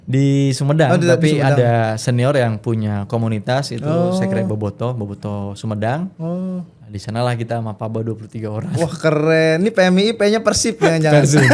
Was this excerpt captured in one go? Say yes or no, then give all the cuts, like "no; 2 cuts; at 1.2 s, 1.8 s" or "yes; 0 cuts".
yes; 0 cuts